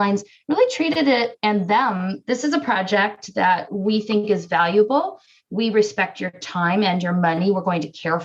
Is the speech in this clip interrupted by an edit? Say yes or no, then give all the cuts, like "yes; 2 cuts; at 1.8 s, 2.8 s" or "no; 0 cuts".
yes; 1 cut; at 2.1 s